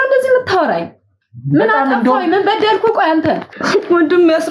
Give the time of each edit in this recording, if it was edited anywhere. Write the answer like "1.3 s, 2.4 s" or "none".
3.5 s